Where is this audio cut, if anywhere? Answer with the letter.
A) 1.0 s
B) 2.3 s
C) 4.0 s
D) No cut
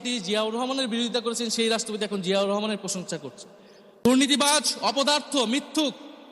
C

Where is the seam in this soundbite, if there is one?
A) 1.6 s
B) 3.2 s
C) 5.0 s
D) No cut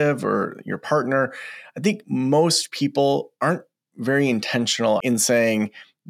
C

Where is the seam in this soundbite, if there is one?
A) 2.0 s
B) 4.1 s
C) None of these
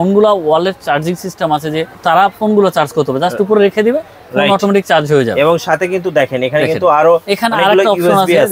A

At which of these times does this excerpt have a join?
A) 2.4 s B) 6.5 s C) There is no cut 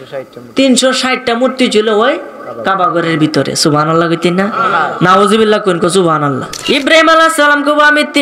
B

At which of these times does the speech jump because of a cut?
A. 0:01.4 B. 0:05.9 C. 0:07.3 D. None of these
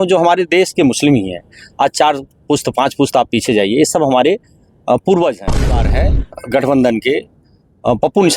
B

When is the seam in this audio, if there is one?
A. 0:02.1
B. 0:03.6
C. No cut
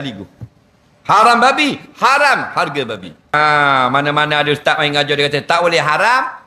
B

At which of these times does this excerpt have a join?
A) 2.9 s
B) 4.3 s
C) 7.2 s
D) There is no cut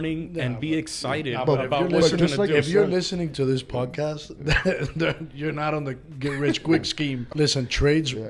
C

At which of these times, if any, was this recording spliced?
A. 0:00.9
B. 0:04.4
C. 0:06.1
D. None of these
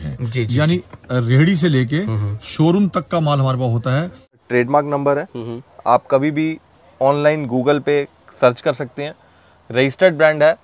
B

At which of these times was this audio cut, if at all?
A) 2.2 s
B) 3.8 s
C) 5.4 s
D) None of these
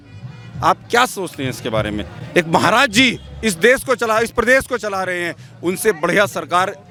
D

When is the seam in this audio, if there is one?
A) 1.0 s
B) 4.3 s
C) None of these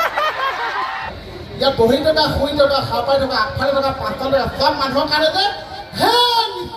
A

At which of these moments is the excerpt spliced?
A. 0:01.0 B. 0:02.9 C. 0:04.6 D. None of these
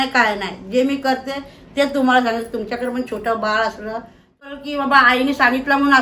C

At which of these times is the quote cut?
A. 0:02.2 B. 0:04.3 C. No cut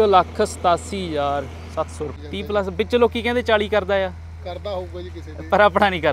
A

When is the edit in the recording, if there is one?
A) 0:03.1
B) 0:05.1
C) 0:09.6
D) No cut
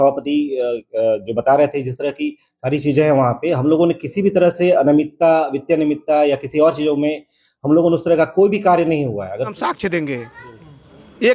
C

